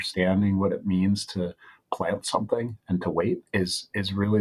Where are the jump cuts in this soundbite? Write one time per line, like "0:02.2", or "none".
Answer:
0:03.4